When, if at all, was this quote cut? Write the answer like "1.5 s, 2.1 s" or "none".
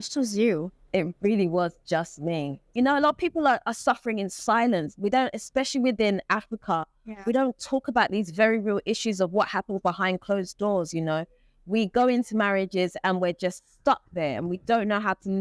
2.6 s